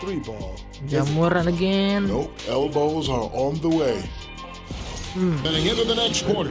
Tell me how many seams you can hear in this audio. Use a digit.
1